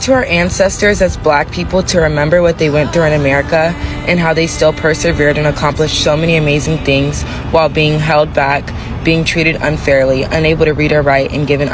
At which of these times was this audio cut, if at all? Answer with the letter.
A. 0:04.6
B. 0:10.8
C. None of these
C